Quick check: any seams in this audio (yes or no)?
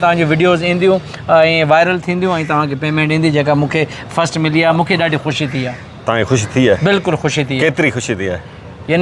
no